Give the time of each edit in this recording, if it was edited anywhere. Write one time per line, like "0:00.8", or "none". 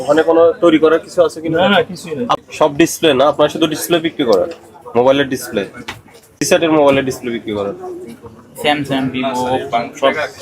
0:02.4
0:06.4